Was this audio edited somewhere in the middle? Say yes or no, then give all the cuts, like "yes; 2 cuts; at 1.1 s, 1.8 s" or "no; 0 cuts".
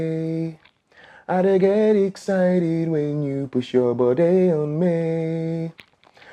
no; 0 cuts